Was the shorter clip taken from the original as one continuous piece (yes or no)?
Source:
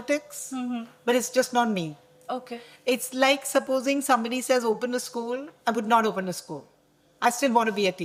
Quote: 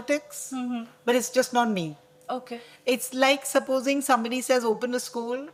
yes